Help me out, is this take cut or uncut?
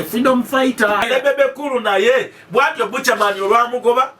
cut